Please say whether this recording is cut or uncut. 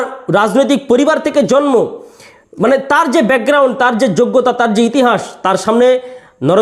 uncut